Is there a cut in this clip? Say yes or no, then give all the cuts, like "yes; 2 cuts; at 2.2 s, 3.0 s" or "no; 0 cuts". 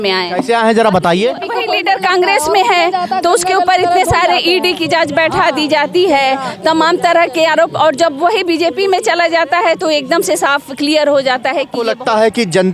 yes; 2 cuts; at 1.6 s, 11.7 s